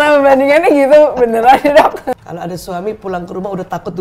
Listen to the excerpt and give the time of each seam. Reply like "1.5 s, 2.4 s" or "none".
2.2 s